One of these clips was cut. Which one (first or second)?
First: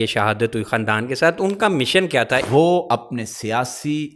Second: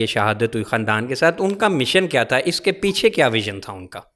first